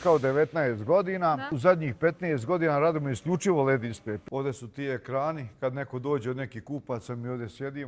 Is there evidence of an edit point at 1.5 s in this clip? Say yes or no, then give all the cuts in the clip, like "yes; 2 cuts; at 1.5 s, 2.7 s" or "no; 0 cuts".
yes; 2 cuts; at 1.5 s, 4.1 s